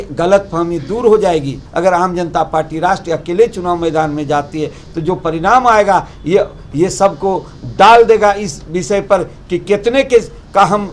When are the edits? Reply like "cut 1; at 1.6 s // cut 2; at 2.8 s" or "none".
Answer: cut 1; at 1.6 s